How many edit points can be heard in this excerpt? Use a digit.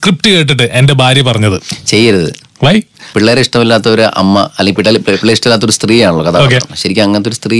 0